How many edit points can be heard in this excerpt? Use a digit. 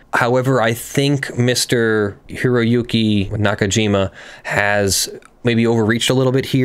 2